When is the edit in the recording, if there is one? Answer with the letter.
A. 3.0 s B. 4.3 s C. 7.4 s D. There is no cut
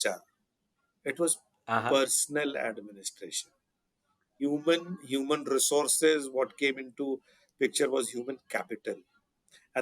B